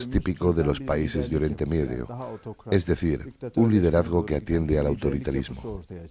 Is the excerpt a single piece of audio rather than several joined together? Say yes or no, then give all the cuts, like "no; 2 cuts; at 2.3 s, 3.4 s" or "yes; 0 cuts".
no; 1 cut; at 5.2 s